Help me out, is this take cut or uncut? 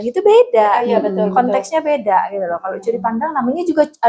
uncut